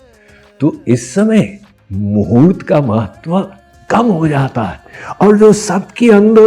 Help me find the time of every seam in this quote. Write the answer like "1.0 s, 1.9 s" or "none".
none

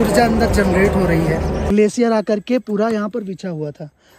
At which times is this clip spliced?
1.6 s

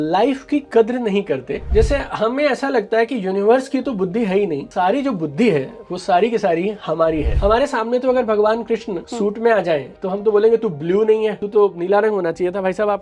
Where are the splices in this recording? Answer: 1.6 s, 7.3 s

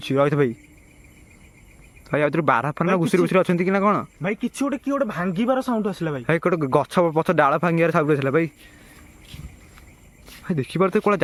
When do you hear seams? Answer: none

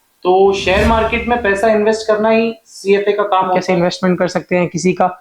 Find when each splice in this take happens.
3.6 s

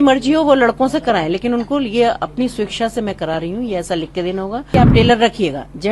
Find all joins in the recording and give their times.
4.7 s

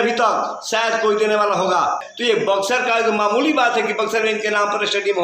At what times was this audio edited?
2.0 s

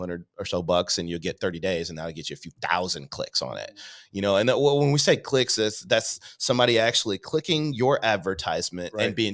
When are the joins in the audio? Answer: none

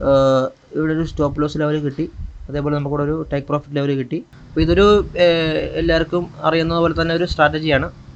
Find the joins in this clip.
4.4 s

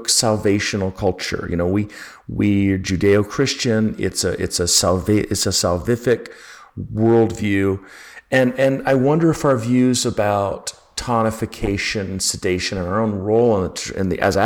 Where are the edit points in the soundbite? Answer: none

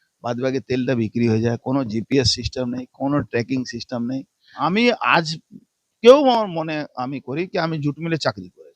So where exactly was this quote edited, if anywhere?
4.4 s

